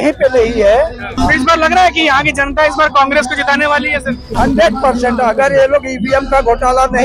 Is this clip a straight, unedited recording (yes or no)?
no